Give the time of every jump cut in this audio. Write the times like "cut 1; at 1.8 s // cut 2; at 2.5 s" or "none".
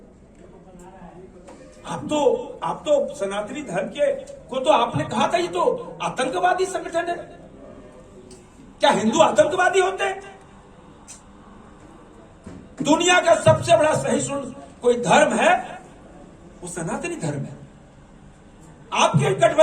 none